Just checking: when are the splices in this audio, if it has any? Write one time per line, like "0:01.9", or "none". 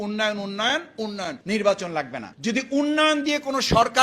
0:02.2

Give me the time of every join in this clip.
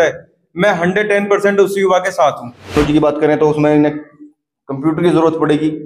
0:02.8

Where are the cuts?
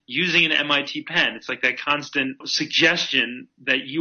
0:02.5

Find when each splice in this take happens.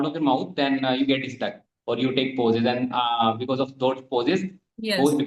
none

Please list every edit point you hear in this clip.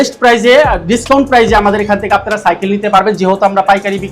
none

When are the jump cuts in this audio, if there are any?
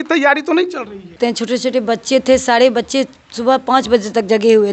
0:01.1

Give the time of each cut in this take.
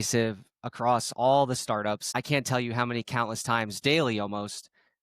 0:02.1

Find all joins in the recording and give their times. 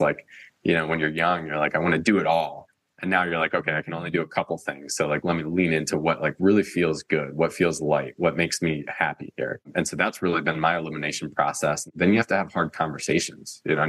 0:09.7
0:11.9

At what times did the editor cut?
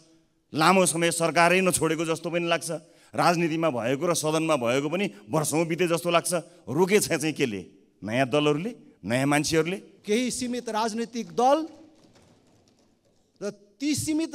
0:09.9

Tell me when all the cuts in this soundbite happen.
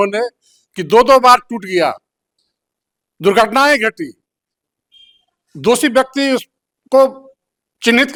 none

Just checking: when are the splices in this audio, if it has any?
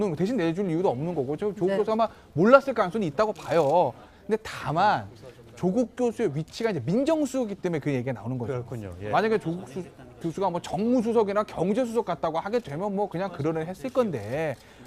0:12.5

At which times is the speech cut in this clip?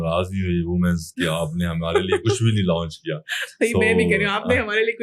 none

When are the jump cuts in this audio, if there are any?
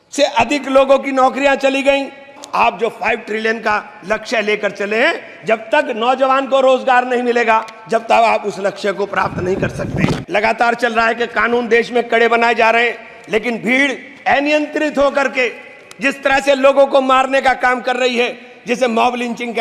0:02.4
0:10.2

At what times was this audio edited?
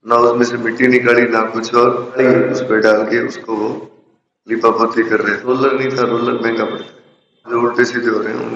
0:02.2
0:05.5
0:07.5

